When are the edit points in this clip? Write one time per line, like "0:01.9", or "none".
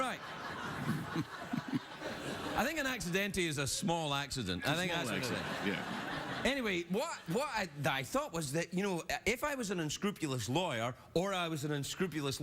0:11.1